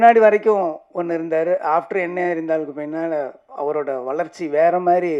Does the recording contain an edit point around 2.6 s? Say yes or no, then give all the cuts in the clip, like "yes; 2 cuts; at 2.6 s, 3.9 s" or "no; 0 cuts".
no; 0 cuts